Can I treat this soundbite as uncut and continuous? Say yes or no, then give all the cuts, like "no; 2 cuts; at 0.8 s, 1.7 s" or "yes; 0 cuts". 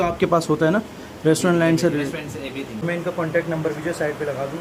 yes; 0 cuts